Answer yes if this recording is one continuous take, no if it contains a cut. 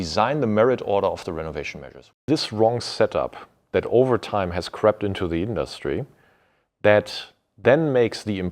no